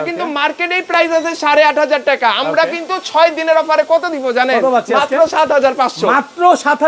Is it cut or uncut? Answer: uncut